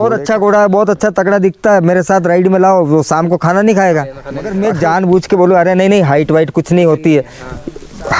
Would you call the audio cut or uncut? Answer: cut